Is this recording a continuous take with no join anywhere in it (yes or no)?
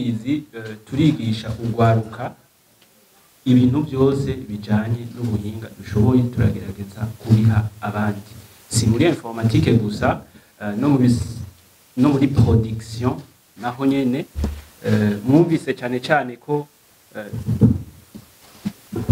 yes